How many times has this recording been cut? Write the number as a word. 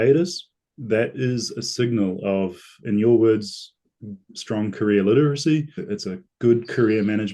one